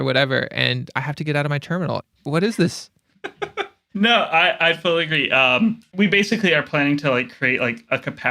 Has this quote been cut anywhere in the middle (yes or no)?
yes